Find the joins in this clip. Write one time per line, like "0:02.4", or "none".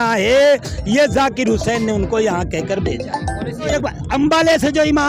0:03.7